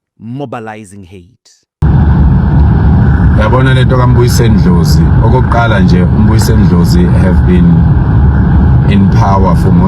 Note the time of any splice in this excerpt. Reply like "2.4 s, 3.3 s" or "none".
1.8 s